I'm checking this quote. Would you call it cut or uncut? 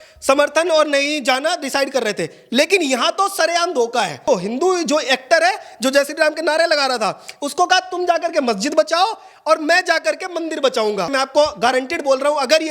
cut